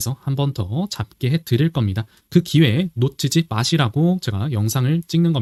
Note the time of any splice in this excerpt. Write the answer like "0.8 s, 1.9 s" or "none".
none